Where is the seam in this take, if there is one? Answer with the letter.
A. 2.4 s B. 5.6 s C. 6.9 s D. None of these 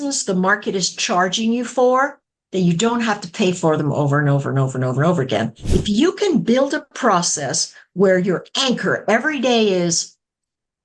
B